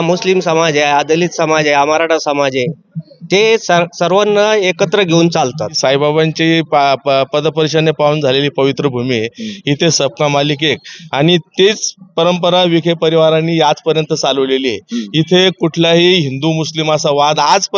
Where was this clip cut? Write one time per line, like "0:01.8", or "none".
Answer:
0:05.8